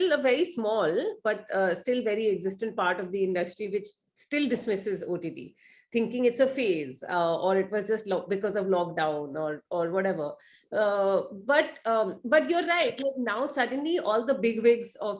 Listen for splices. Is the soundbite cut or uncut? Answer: uncut